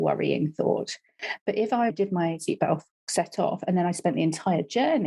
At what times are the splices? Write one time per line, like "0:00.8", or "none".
0:01.9